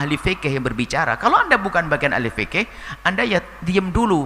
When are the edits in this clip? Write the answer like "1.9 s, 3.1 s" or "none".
none